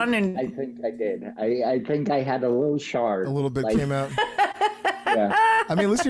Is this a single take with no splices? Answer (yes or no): yes